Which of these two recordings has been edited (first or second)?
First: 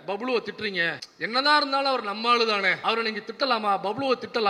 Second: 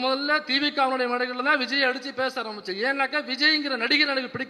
first